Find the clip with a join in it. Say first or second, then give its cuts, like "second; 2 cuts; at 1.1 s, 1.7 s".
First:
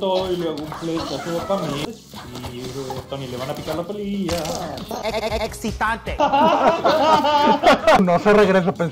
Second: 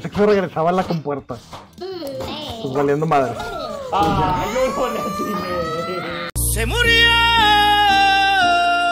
first; 2 cuts; at 2.1 s, 8.0 s